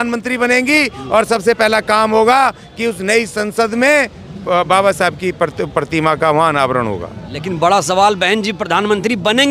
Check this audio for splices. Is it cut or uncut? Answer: uncut